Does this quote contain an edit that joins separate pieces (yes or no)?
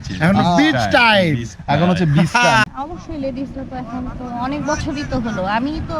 yes